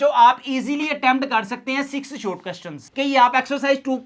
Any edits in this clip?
yes; 1 cut; at 2.9 s

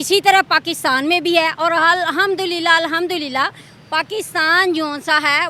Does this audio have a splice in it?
no; 0 cuts

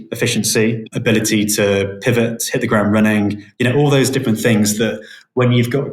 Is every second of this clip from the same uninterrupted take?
no; 1 cut; at 0.9 s

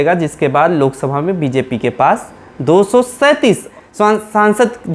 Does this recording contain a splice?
yes; 1 cut; at 3.7 s

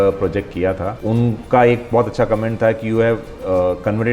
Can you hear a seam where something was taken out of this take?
yes; 1 cut; at 1.0 s

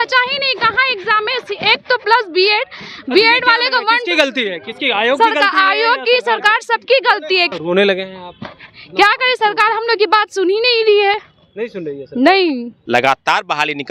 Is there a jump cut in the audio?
yes; 2 cuts; at 7.5 s, 12.7 s

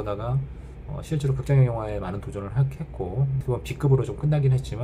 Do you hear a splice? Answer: yes; 1 cut; at 3.4 s

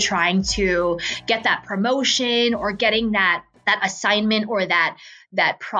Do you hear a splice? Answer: yes; 1 cut; at 3.5 s

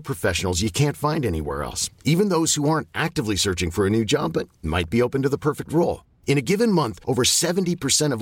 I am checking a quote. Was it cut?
no; 0 cuts

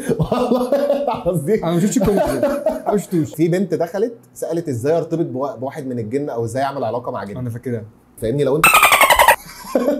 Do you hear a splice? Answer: yes; 2 cuts; at 3.3 s, 8.2 s

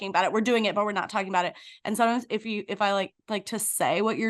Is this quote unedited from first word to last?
yes; 0 cuts

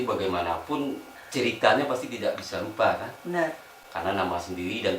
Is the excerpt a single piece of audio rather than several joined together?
no; 1 cut; at 1.1 s

